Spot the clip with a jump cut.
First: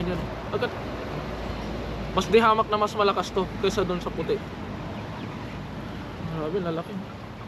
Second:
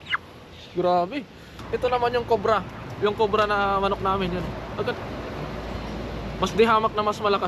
second; 1 cut; at 1.6 s

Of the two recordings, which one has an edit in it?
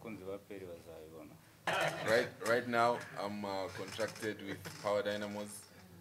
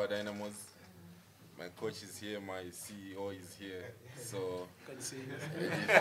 first; 1 cut; at 1.7 s

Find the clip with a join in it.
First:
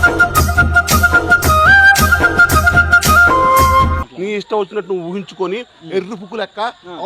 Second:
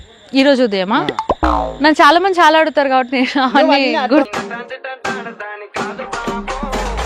first; 1 cut; at 4.1 s

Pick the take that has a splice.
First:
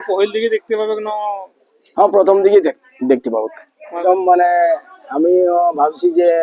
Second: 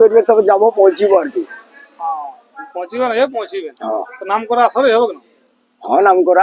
first; 1 cut; at 4.0 s

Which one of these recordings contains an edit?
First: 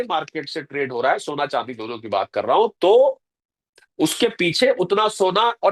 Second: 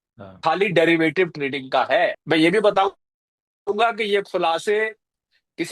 second; 1 cut; at 2.2 s

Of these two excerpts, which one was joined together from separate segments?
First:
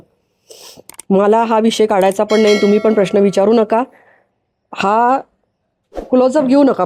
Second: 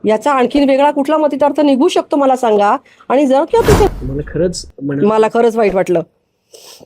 second; 1 cut; at 3.9 s

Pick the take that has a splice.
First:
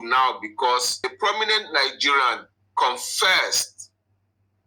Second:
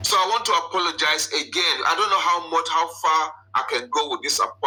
first; 1 cut; at 1.0 s

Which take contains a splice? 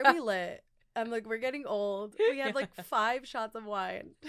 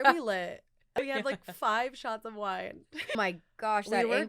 second; 2 cuts; at 1.0 s, 3.2 s

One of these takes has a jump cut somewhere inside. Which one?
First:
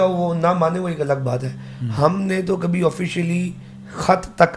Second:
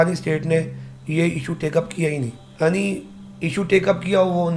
second; 1 cut; at 2.4 s

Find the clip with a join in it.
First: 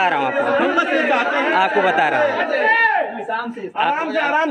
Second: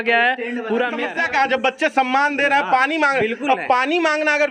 second; 1 cut; at 1.0 s

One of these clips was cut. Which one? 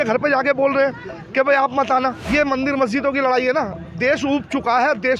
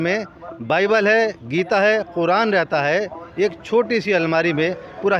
first; 1 cut; at 2.2 s

